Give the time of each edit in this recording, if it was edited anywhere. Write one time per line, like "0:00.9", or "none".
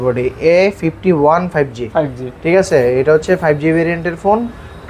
none